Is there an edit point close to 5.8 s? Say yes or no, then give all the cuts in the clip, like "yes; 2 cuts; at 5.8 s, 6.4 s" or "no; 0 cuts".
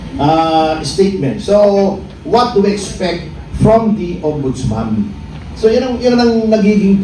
no; 1 cut; at 1.4 s